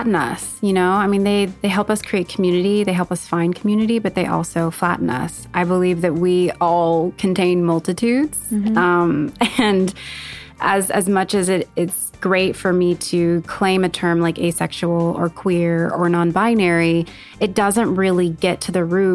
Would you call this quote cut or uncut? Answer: cut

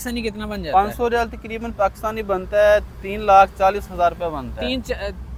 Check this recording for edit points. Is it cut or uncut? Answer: uncut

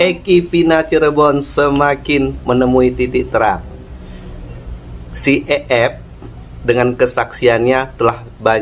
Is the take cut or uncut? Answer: uncut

